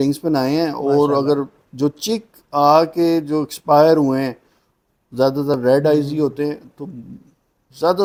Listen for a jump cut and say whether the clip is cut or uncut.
uncut